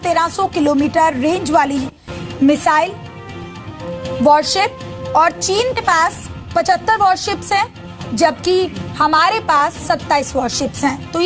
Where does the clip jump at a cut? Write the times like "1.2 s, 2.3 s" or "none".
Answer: 10.2 s